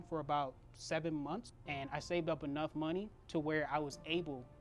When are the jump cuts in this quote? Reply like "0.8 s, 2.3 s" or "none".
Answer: 1.6 s, 3.2 s